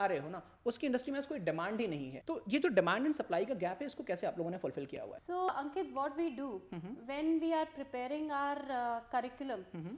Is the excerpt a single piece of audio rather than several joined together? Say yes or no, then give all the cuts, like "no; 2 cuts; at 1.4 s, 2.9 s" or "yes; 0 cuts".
yes; 0 cuts